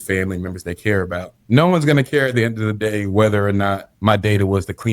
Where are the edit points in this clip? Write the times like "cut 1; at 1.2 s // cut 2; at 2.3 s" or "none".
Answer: cut 1; at 1.3 s